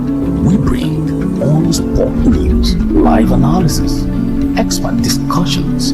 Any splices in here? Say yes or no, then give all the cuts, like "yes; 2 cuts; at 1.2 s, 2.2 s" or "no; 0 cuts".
yes; 1 cut; at 2.8 s